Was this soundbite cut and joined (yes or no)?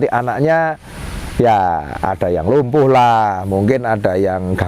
no